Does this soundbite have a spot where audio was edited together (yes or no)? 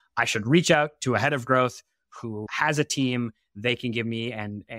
yes